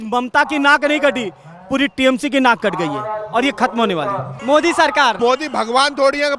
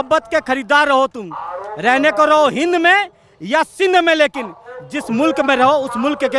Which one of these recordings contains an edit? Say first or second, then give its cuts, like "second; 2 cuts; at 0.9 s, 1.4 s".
first; 2 cuts; at 4.3 s, 5.2 s